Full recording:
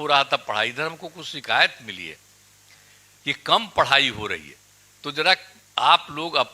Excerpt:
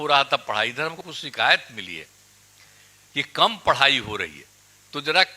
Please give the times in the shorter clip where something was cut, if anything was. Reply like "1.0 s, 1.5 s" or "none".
1.1 s